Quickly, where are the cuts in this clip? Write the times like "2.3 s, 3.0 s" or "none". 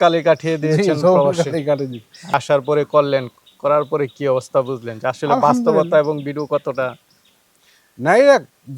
2.3 s